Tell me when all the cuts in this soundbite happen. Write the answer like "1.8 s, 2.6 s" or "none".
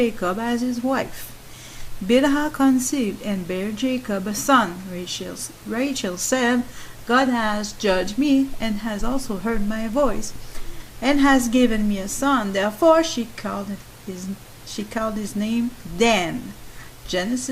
none